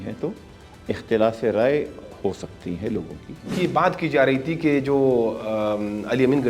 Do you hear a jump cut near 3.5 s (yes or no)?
yes